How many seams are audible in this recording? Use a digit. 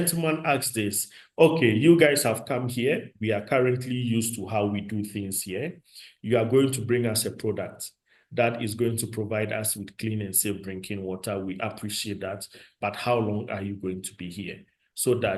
0